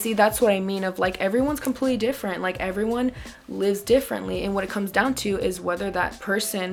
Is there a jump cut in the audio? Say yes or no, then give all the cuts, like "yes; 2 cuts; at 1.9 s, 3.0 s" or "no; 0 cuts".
no; 0 cuts